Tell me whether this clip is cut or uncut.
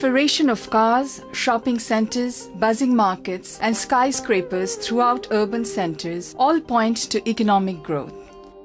uncut